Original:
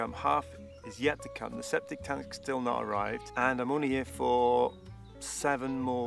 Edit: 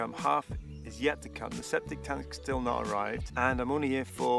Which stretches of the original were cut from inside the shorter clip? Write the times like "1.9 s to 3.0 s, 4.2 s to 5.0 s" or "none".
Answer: none